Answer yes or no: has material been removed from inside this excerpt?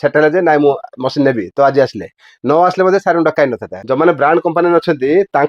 yes